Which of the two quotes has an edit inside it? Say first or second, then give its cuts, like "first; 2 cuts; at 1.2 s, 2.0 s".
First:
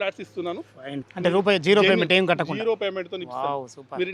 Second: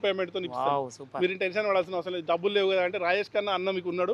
first; 1 cut; at 1.1 s